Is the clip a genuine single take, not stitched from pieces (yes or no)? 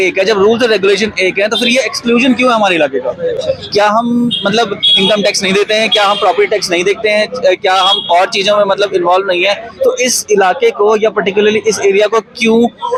yes